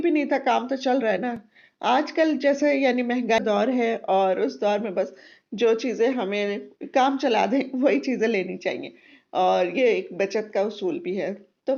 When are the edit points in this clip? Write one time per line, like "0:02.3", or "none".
none